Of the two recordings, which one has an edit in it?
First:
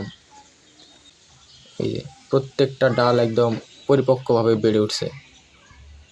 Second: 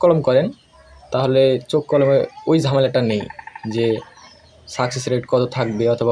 first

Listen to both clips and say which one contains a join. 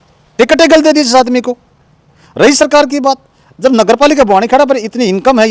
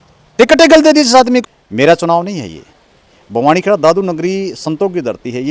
second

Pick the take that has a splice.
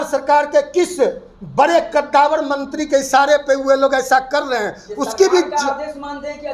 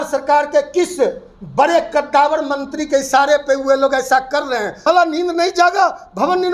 second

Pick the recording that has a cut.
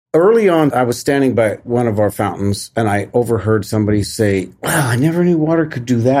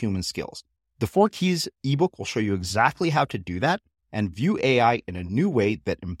first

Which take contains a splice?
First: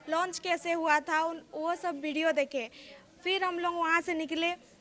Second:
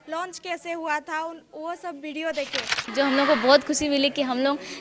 second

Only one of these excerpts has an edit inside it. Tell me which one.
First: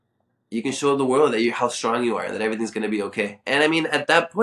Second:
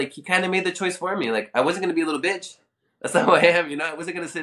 first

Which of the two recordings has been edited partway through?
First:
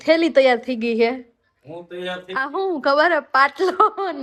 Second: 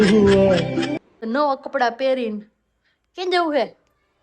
second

